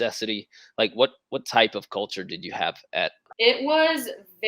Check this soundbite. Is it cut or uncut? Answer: cut